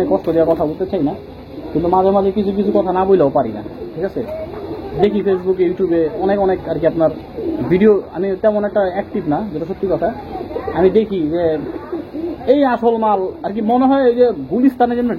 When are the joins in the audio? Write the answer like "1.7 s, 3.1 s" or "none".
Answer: none